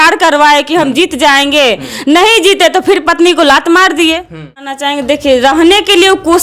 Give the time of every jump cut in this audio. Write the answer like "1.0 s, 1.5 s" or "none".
4.6 s